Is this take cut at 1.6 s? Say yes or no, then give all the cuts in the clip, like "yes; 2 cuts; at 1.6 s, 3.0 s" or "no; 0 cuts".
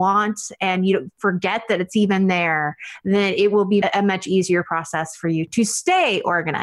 no; 2 cuts; at 3.8 s, 5.5 s